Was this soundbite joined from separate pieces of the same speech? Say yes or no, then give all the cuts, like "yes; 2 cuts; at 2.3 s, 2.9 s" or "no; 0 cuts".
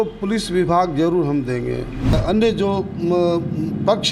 yes; 1 cut; at 2.2 s